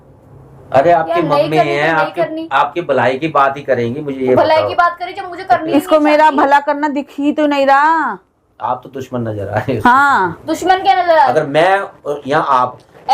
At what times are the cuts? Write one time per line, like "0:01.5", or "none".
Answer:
0:11.2